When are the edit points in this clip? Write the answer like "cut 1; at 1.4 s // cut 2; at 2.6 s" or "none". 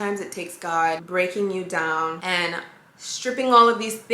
cut 1; at 1.0 s // cut 2; at 2.2 s